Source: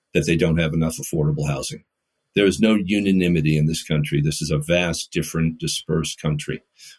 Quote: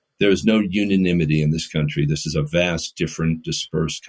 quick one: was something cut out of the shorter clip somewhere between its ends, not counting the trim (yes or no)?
no